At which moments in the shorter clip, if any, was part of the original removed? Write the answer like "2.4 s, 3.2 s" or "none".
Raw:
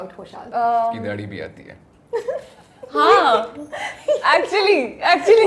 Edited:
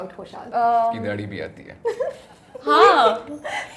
1.6 s

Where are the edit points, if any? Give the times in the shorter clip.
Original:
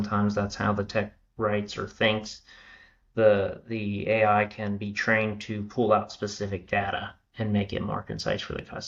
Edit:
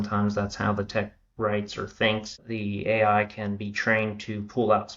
2.4 s

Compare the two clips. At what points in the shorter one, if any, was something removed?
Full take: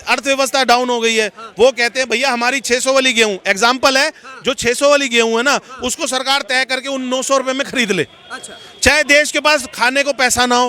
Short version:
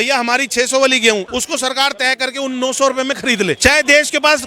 1.3 s, 3.6 s

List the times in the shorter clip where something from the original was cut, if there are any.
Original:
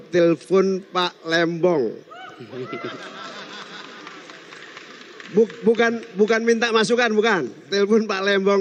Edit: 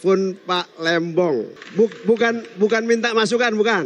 1.6 s

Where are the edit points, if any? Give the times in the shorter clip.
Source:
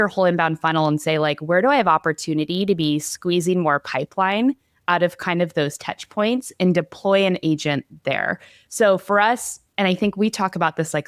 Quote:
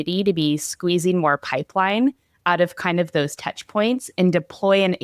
none

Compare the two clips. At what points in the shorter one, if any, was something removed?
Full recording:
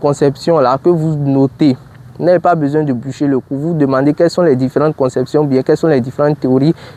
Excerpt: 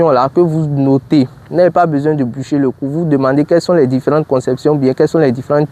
1.4 s

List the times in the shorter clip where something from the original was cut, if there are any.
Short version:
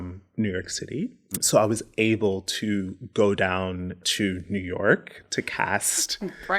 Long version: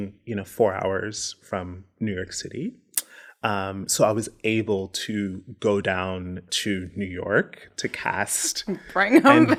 1.4 s

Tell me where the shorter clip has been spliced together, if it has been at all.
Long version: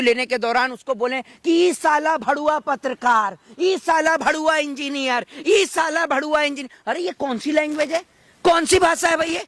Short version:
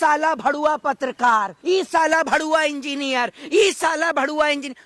1.5 s

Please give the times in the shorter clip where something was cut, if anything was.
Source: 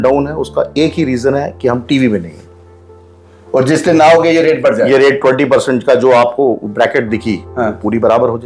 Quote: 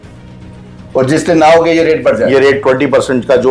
none

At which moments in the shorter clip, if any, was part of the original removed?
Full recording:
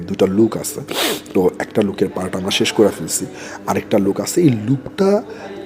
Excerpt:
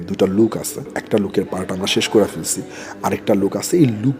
0.9 s

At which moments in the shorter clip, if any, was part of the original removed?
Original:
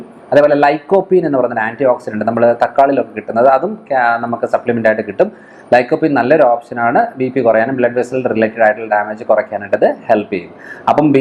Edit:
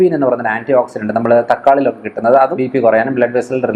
2.6 s

